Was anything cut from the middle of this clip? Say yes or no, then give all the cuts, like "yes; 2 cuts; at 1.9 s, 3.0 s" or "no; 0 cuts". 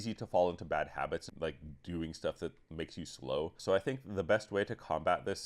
yes; 2 cuts; at 1.3 s, 3.6 s